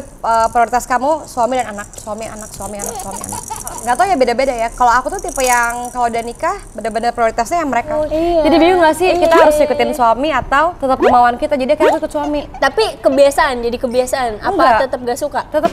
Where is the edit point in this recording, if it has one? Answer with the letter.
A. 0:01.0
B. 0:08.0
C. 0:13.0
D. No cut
B